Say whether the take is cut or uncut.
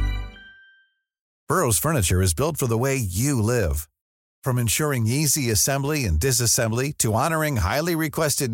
cut